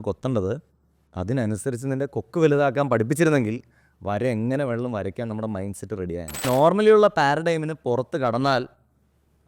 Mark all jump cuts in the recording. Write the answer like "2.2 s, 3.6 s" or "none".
6.4 s